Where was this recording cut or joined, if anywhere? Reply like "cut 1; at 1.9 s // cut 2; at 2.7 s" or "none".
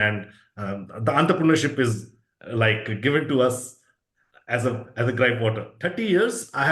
cut 1; at 5.7 s